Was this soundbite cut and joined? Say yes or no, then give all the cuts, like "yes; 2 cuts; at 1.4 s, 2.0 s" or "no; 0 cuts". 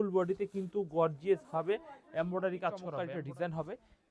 yes; 1 cut; at 2.9 s